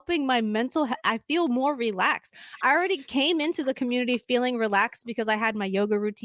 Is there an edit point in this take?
no; 0 cuts

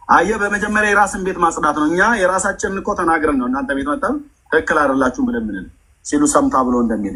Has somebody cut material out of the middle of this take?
no; 0 cuts

